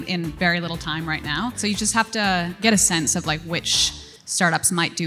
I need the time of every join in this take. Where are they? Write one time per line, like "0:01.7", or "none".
0:01.6
0:02.6